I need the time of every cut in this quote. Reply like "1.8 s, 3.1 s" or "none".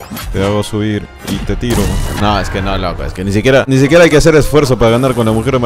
2.1 s, 3.7 s